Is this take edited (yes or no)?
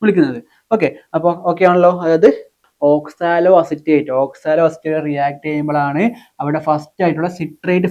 yes